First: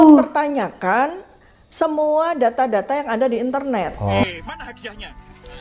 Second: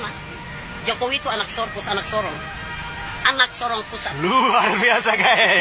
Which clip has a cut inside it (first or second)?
first